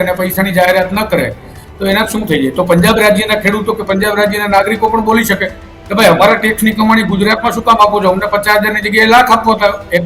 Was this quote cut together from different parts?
no; 0 cuts

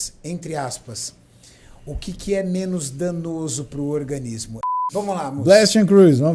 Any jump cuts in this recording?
yes; 1 cut; at 4.7 s

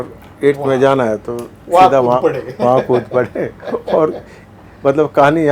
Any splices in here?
no; 0 cuts

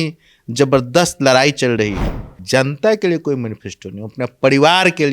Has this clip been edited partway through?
yes; 1 cut; at 2.3 s

